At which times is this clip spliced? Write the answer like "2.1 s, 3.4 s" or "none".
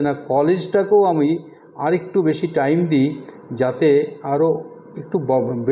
none